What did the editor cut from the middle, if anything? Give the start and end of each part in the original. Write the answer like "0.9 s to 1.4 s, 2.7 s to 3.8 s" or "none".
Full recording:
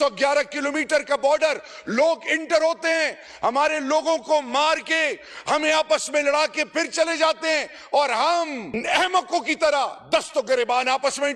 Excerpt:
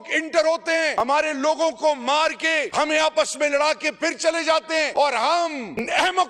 3.2 s to 3.5 s, 5.1 s to 5.4 s, 7.6 s to 7.9 s